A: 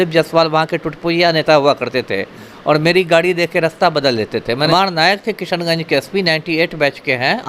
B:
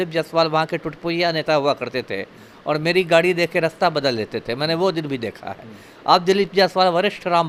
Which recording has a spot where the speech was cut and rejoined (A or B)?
A